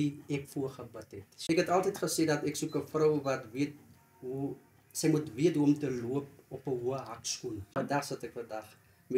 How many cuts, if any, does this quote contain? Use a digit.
2